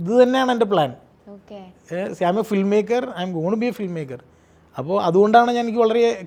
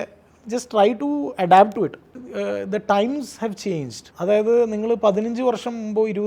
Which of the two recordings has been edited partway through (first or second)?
second